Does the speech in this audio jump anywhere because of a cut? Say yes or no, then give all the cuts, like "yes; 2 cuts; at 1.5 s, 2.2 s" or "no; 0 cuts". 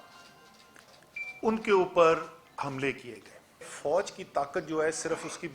yes; 1 cut; at 3.7 s